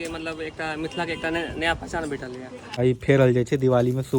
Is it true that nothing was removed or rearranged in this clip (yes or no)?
no